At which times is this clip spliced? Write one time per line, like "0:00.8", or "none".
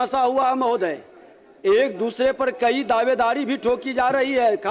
none